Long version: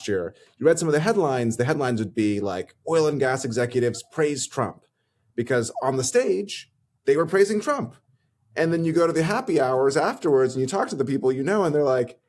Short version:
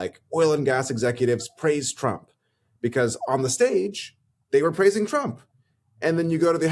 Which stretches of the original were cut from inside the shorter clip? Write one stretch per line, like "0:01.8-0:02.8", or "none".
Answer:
none